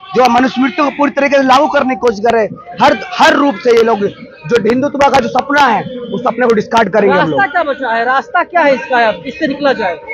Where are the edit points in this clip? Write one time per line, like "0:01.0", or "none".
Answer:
none